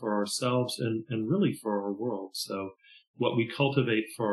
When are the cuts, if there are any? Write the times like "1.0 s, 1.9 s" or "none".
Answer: none